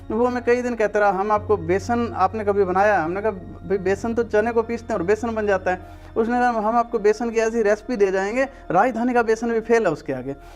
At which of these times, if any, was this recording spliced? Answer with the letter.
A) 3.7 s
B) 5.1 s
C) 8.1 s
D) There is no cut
D